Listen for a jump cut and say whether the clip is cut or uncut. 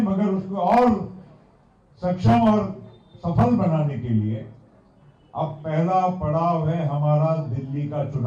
uncut